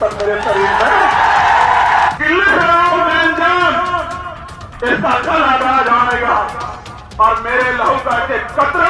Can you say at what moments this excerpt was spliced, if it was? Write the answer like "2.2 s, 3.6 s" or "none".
2.1 s